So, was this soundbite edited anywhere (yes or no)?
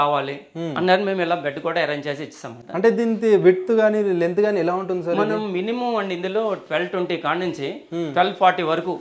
no